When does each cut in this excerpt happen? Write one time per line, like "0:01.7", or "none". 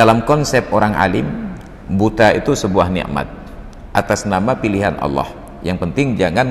none

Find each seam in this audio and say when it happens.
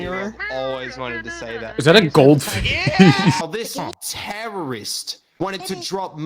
0:03.4

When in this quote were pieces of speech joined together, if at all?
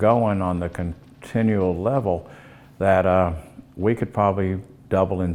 none

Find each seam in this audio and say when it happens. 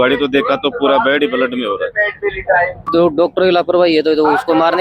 0:02.9

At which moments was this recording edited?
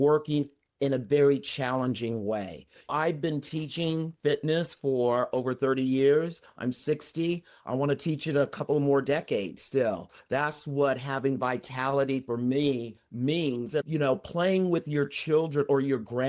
0:02.9
0:13.8

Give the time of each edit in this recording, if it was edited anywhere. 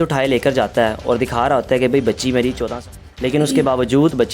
0:02.8

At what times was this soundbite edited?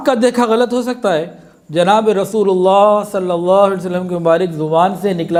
none

